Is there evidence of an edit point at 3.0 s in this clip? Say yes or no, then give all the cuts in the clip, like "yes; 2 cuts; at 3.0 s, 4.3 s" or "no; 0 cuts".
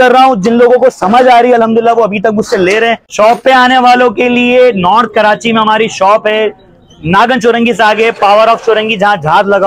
yes; 1 cut; at 3.0 s